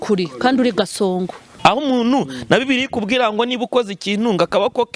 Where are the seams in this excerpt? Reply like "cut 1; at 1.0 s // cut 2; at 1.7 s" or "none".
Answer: cut 1; at 1.4 s